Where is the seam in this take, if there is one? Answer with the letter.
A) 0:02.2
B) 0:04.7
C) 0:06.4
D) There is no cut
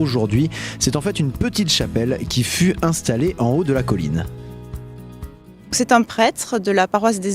C